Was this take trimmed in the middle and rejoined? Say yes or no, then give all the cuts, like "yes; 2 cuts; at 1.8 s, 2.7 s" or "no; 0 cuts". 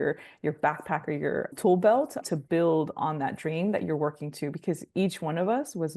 yes; 2 cuts; at 1.5 s, 2.2 s